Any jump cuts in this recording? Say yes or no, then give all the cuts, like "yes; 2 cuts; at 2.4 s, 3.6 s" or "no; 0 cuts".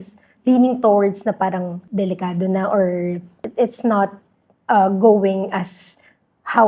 yes; 2 cuts; at 1.8 s, 3.4 s